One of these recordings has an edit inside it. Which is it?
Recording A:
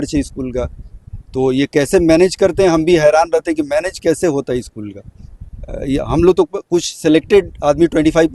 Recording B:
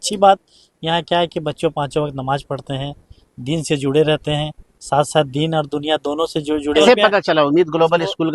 B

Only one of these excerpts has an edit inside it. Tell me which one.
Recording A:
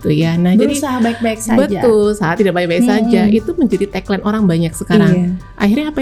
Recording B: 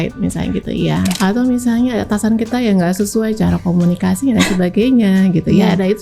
B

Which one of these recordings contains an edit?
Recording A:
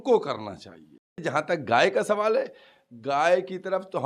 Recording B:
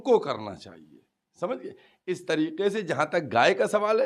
A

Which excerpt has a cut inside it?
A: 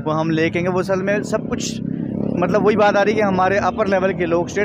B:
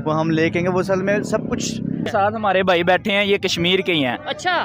B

